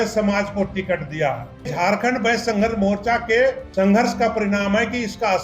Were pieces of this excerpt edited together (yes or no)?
yes